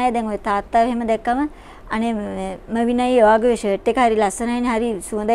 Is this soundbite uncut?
yes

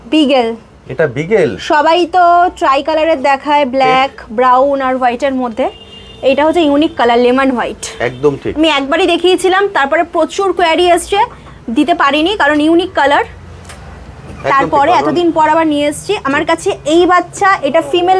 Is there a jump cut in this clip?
no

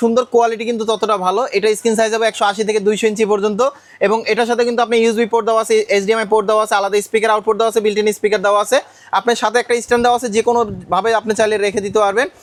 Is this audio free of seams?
yes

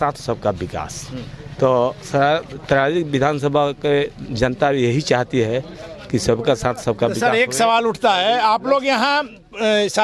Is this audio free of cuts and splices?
yes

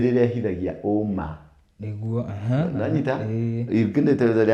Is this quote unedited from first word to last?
yes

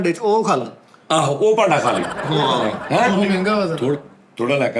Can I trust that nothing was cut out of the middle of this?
yes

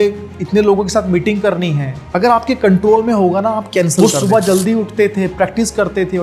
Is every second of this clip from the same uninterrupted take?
no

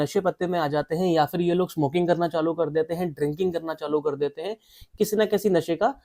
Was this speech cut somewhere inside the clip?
no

